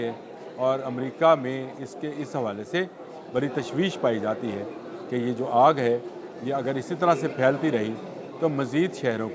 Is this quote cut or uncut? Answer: uncut